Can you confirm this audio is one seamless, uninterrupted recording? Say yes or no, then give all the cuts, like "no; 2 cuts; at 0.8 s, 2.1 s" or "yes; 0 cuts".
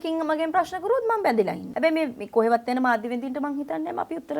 no; 1 cut; at 1.6 s